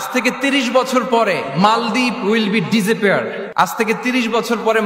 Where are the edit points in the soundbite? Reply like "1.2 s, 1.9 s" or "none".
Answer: 3.4 s